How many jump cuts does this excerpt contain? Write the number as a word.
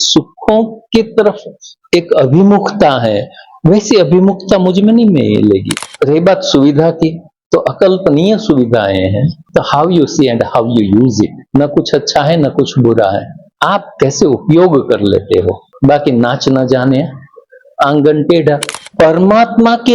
two